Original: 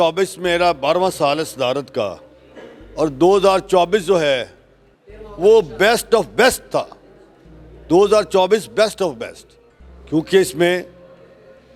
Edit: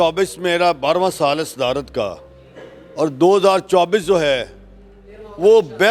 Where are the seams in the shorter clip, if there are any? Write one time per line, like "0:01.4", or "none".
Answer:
none